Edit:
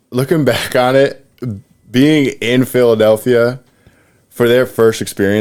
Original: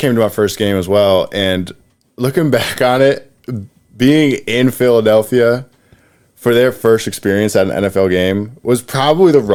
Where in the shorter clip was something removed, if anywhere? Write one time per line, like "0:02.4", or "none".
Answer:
none